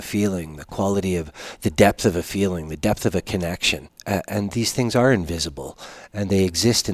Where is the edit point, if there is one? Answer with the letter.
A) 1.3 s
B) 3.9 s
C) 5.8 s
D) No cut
B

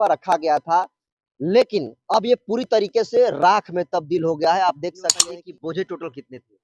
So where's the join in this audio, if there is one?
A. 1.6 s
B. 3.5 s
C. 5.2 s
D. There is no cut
C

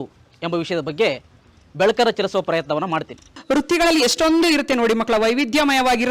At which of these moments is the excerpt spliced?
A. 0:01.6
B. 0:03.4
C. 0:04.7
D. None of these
B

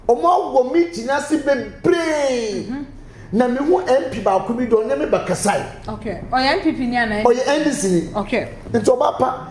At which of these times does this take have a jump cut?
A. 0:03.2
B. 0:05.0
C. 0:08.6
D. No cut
C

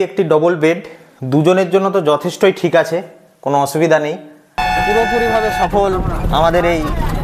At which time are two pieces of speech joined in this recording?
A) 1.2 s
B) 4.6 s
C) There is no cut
B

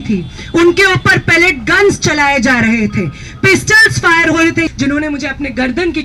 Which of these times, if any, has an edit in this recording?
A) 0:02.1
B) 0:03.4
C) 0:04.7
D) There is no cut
C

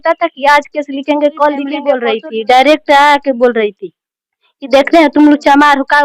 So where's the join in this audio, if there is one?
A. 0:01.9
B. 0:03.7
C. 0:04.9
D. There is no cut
A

